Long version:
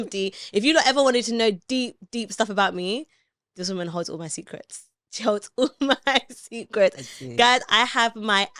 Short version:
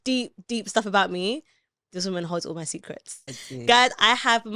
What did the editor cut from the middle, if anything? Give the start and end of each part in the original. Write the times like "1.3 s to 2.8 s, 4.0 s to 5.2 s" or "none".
5.0 s to 7.1 s